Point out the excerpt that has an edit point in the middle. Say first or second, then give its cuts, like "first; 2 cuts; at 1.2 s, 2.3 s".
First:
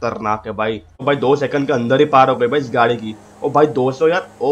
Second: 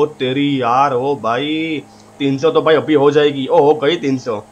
first; 1 cut; at 1.0 s